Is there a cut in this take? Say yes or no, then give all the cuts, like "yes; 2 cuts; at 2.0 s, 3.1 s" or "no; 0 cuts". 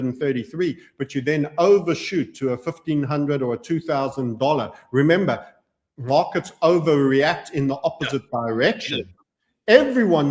no; 0 cuts